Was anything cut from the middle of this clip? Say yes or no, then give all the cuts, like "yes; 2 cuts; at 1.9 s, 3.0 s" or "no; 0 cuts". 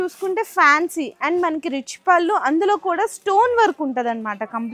no; 0 cuts